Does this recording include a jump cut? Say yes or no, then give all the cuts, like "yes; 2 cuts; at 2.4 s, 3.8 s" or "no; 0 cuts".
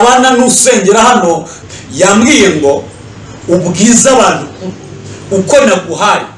yes; 1 cut; at 1.5 s